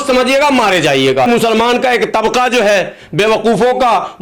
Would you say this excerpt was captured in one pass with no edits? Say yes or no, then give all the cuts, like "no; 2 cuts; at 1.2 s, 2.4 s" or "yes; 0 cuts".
no; 1 cut; at 1.3 s